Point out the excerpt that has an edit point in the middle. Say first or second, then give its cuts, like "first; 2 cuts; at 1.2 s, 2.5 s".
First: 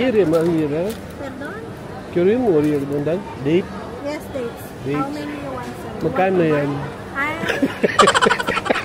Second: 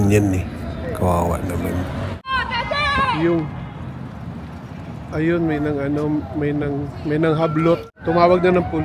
second; 2 cuts; at 2.4 s, 7.9 s